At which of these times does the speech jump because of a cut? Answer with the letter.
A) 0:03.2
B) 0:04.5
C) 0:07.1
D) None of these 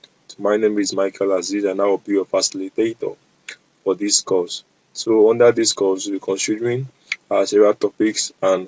D